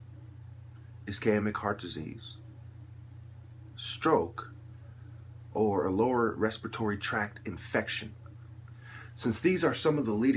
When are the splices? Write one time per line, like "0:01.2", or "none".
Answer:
0:01.6

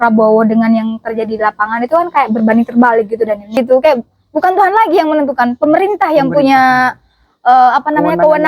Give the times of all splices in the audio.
0:03.6

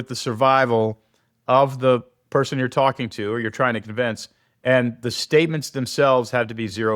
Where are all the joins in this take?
none

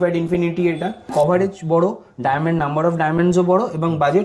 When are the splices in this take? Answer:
0:01.1

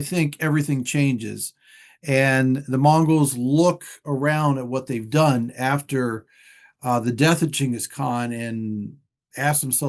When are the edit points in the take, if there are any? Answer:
none

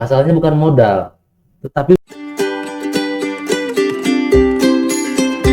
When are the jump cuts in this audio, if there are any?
0:02.0

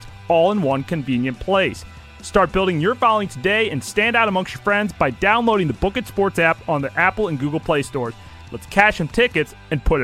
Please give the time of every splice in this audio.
none

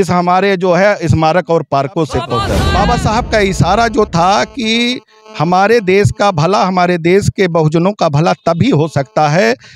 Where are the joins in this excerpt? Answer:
0:02.6

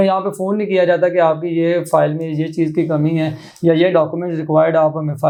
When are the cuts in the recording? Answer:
none

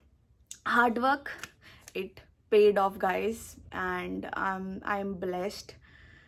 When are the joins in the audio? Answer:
none

